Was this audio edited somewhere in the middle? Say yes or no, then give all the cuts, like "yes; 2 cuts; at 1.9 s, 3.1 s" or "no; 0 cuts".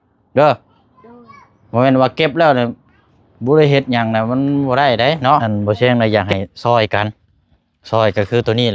yes; 1 cut; at 5.5 s